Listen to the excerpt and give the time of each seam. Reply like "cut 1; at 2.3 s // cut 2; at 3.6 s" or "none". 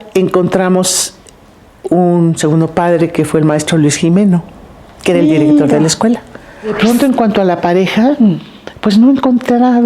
cut 1; at 6.7 s